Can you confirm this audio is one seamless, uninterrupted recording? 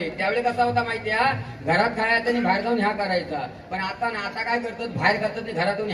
yes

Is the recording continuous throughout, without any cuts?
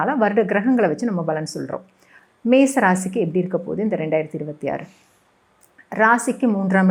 yes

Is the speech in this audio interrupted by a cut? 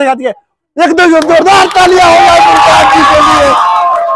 no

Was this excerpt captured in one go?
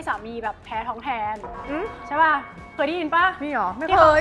yes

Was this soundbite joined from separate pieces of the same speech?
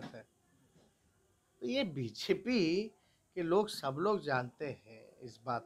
no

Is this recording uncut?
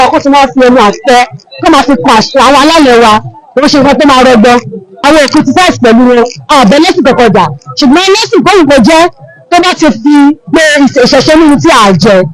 no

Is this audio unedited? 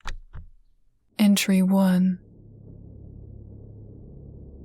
no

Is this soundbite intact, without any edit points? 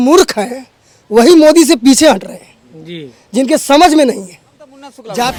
yes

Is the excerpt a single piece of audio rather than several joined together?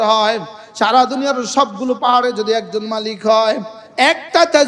no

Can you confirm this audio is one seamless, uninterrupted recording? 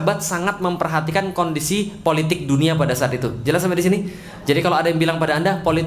yes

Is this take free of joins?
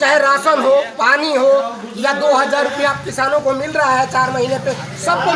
yes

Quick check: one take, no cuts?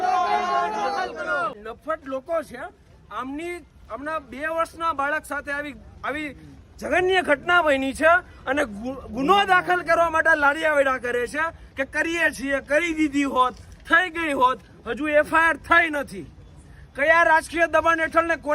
no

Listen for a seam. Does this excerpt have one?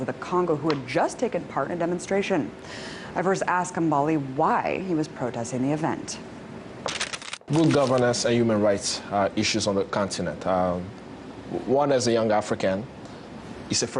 no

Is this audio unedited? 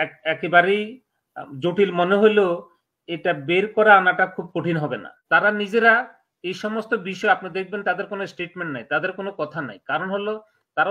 no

